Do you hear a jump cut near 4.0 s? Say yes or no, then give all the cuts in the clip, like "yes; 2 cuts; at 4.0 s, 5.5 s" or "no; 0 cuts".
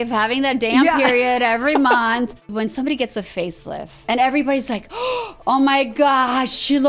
yes; 2 cuts; at 2.4 s, 4.0 s